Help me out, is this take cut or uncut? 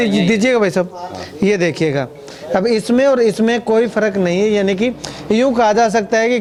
uncut